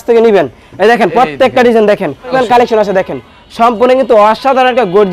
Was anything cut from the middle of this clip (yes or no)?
yes